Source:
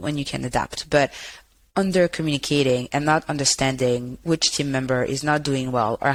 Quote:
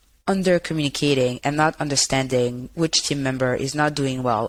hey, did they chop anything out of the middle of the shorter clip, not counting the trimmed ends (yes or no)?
no